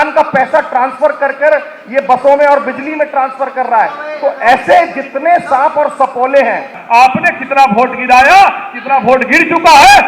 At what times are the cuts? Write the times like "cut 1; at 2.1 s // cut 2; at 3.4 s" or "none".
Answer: cut 1; at 6.8 s